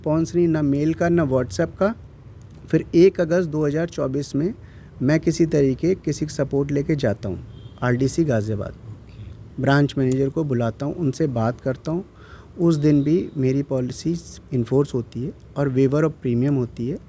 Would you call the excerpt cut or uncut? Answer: uncut